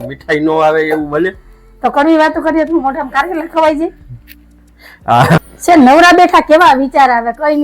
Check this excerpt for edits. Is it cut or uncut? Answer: cut